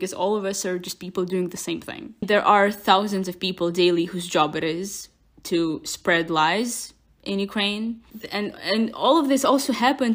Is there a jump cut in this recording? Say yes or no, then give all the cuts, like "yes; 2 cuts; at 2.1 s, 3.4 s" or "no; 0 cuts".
yes; 2 cuts; at 2.3 s, 8.1 s